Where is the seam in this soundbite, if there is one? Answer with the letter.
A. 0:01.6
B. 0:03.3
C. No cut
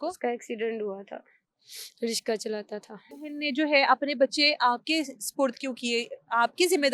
B